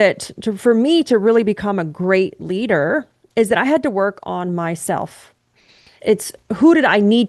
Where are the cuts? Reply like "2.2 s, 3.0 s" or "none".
5.9 s